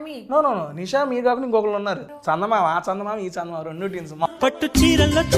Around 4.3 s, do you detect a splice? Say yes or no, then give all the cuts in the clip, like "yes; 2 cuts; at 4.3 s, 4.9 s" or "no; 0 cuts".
yes; 2 cuts; at 2.1 s, 4.3 s